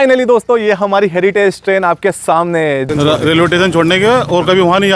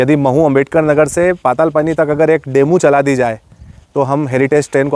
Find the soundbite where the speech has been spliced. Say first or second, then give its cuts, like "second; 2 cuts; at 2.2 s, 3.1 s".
first; 1 cut; at 2.9 s